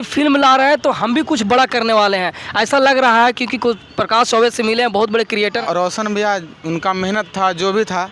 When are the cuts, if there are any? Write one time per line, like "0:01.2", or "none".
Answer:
0:05.6